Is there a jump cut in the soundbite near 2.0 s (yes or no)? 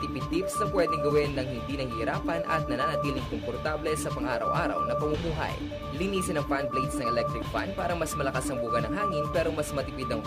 no